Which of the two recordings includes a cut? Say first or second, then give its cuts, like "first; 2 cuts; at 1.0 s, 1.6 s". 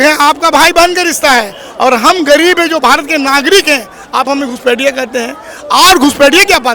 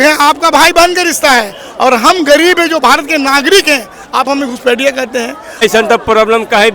second; 1 cut; at 5.6 s